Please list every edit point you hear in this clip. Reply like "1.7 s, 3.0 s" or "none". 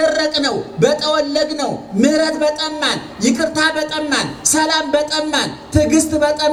none